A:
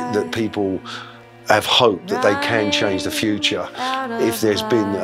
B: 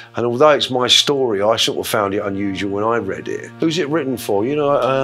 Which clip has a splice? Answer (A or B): B